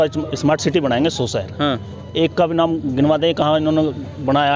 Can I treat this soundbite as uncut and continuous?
yes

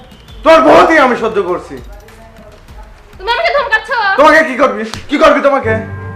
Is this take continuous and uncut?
yes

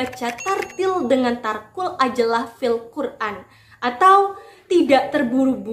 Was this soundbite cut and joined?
no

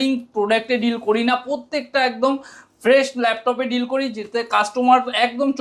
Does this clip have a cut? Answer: no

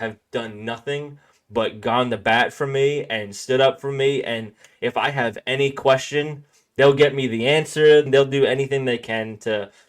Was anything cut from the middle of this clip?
yes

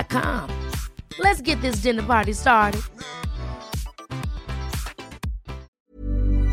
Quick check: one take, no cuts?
no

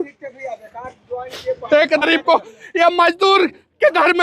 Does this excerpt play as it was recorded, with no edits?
no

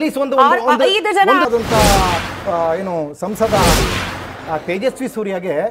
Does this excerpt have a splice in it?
yes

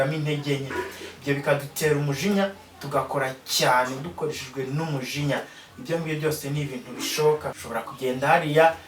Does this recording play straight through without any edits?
no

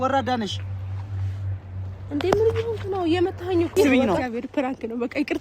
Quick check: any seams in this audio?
yes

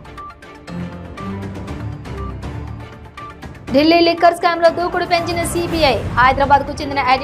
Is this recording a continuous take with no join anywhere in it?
no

